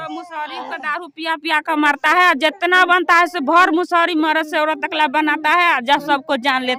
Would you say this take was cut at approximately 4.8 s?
no; 0 cuts

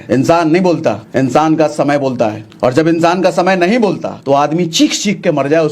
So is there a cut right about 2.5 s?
yes; 3 cuts; at 1.0 s, 2.5 s, 4.1 s

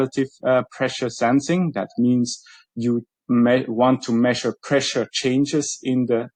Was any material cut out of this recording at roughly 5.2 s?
no; 0 cuts

